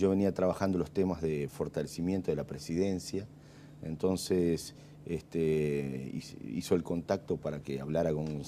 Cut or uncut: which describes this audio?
uncut